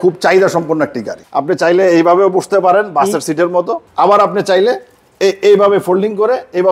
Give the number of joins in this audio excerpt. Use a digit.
1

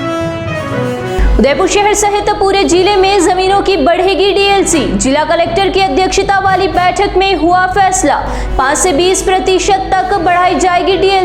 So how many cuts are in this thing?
0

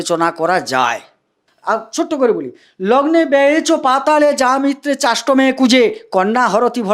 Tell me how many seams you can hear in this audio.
1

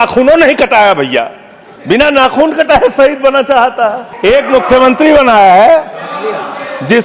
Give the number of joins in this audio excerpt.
1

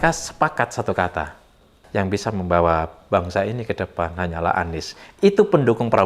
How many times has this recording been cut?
1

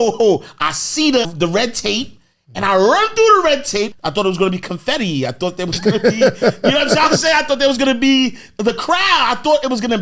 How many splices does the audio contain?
2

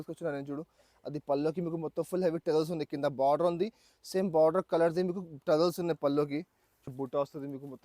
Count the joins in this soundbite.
1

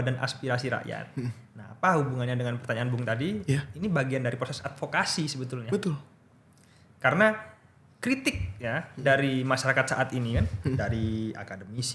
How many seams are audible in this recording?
0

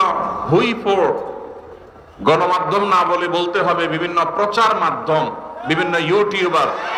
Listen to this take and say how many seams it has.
0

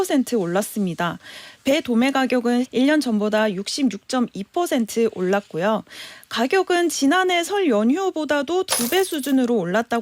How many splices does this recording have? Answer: 1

